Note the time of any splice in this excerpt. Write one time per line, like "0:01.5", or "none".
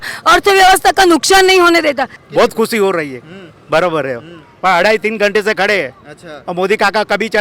0:02.2

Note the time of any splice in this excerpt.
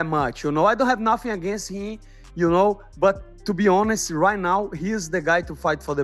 none

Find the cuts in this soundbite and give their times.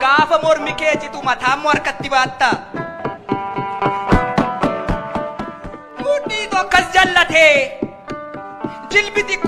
0:05.4

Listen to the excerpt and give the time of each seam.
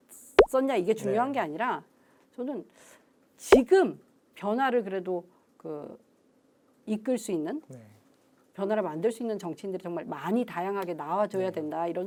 none

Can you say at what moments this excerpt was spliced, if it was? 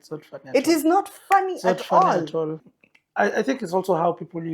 0:02.6

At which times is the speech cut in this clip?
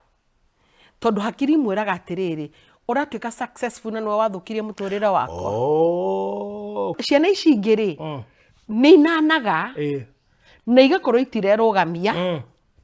0:06.9

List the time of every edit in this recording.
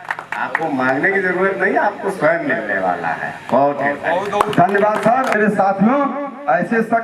none

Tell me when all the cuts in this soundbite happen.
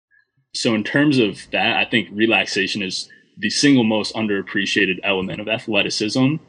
0:01.4

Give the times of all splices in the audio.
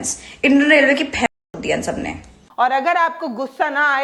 0:02.3

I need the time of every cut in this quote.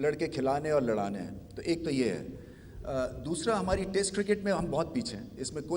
none

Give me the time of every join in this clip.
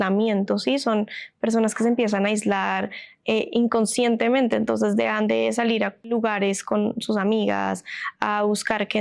0:06.0

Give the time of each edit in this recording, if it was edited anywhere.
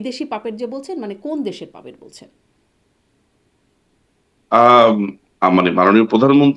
none

